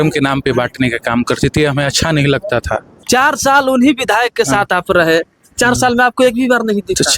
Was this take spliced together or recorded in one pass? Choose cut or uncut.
cut